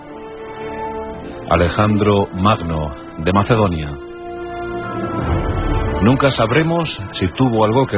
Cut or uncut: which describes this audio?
cut